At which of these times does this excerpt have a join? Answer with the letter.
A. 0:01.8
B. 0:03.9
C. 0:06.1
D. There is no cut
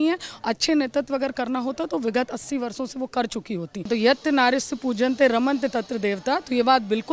B